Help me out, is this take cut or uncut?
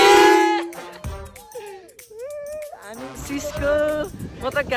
cut